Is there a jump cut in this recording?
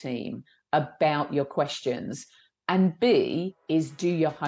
no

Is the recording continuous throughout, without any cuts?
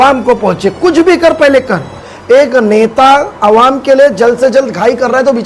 no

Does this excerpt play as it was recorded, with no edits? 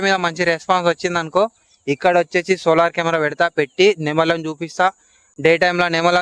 yes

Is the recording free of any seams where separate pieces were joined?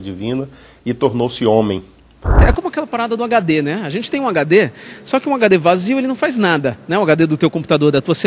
no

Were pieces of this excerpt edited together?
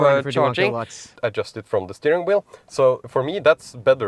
yes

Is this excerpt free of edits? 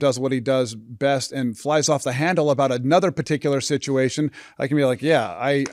yes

